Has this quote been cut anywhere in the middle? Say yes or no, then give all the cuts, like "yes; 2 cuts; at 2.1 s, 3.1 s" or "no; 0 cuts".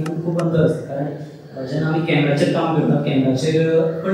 no; 0 cuts